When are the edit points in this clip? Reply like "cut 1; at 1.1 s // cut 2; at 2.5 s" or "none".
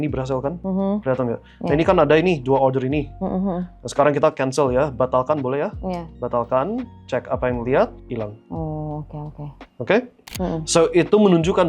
cut 1; at 10.3 s